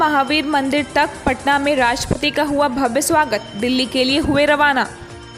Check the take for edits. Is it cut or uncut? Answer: uncut